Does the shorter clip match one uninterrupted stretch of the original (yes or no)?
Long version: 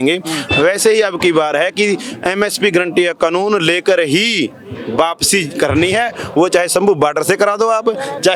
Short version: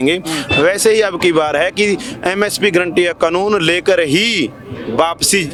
yes